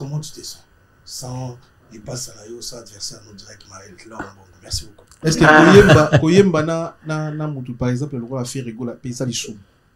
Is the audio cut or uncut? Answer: cut